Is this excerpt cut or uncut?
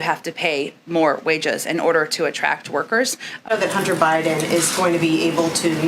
cut